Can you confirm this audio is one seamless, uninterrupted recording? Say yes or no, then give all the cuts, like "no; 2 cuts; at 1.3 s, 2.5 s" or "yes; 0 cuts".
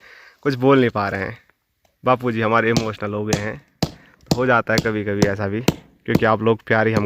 yes; 0 cuts